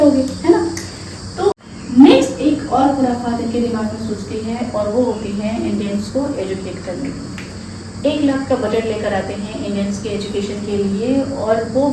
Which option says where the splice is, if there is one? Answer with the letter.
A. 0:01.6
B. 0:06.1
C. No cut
A